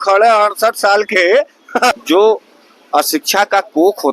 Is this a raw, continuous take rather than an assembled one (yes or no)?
no